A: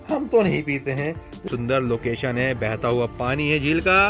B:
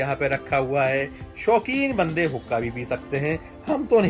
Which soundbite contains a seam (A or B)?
A